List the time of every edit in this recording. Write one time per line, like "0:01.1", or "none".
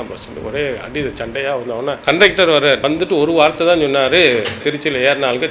0:02.0
0:02.8
0:04.6